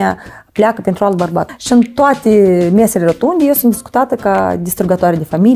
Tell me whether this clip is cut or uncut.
cut